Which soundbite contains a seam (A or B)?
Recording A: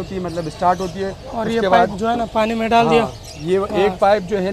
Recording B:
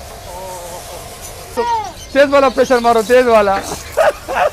B